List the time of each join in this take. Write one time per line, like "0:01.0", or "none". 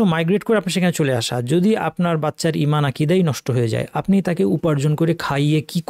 none